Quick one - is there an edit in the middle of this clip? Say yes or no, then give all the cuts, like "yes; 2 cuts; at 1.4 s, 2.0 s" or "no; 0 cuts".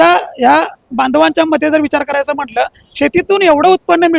no; 0 cuts